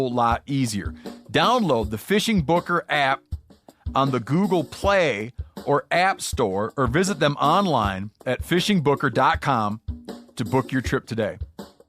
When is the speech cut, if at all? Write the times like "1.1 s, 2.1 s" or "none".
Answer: none

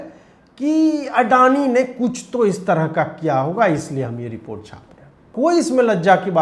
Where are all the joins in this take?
5.3 s

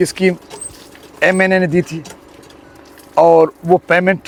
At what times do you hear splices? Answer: none

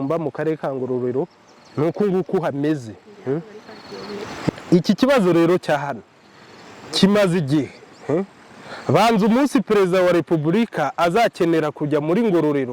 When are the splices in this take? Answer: 4.5 s

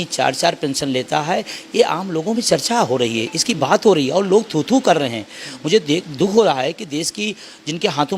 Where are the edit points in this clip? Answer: none

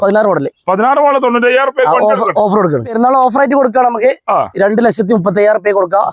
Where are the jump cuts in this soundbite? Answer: 2.9 s

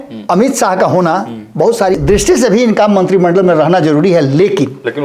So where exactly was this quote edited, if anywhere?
2.0 s

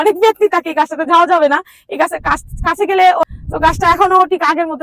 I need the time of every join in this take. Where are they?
3.3 s

